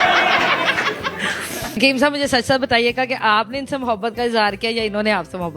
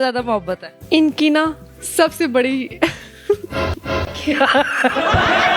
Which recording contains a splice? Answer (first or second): first